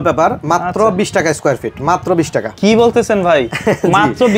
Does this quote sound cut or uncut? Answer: uncut